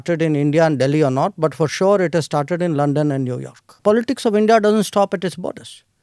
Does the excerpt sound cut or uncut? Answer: cut